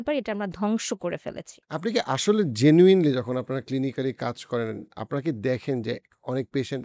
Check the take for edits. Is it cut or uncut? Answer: uncut